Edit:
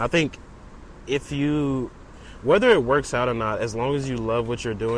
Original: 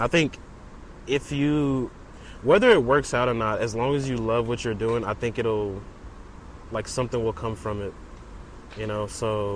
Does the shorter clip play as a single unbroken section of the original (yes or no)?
yes